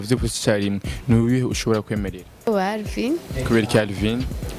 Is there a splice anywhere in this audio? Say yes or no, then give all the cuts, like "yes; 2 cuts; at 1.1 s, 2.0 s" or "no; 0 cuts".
yes; 1 cut; at 2.5 s